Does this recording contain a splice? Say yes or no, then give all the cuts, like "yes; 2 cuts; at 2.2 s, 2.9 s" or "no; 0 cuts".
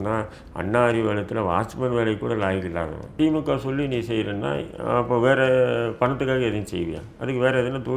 yes; 1 cut; at 3.1 s